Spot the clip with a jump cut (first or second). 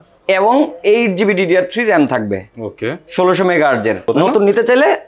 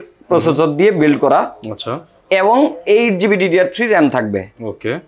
first